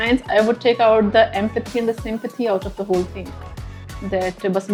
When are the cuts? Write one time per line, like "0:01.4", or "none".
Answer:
none